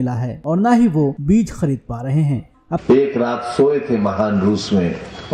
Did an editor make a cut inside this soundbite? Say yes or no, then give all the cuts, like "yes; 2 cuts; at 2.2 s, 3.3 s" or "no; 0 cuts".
no; 0 cuts